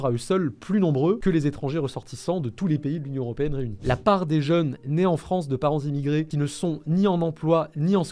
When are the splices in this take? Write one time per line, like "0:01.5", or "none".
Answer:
0:03.8
0:06.3